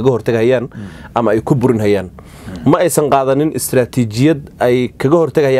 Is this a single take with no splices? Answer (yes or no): yes